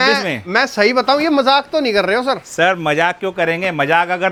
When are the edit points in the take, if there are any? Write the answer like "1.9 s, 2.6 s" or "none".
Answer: none